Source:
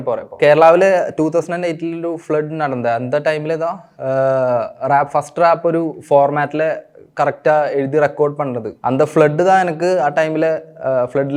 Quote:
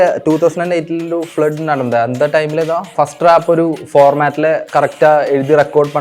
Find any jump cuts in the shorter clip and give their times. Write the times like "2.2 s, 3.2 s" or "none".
2.9 s, 4.6 s